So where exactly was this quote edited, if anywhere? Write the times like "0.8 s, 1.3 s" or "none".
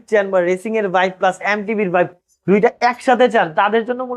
none